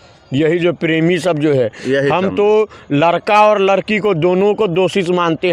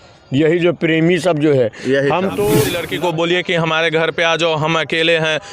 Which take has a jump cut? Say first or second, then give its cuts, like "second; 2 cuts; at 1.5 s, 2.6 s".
second; 1 cut; at 2.8 s